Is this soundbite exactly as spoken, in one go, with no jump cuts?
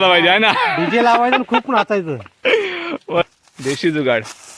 no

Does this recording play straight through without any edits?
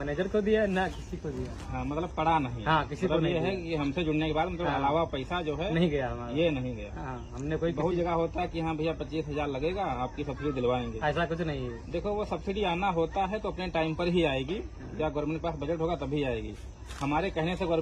yes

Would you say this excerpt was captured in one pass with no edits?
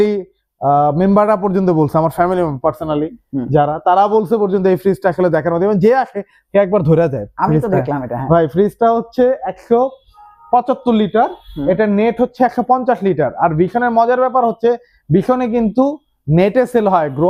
yes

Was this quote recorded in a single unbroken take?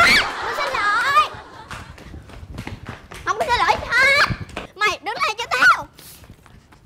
yes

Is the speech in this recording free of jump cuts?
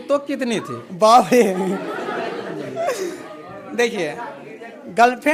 yes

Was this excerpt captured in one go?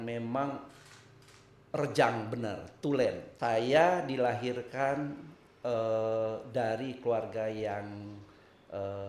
no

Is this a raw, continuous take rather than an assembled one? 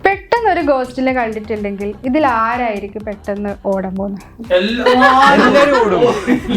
yes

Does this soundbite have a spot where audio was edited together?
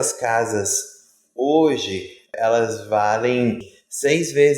yes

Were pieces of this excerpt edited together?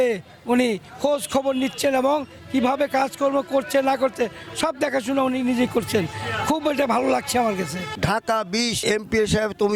yes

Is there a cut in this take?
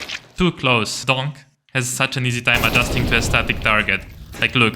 yes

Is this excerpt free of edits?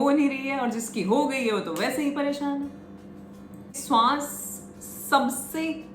no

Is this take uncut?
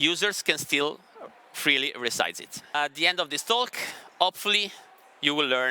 no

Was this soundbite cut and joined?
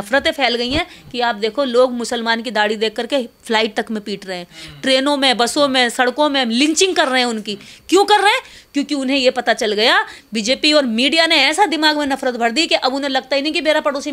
no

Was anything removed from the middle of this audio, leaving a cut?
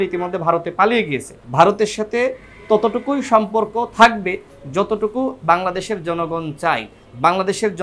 yes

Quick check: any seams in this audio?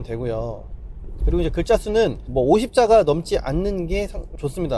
no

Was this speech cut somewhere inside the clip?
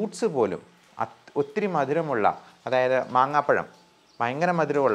no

